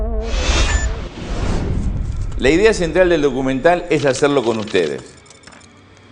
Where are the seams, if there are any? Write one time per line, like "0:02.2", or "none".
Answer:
0:01.8

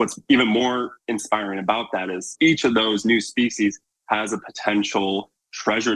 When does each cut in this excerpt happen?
0:01.0
0:02.3

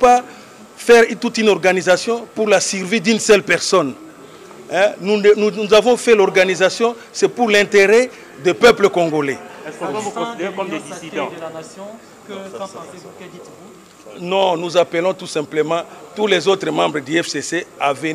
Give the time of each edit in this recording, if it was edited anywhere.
none

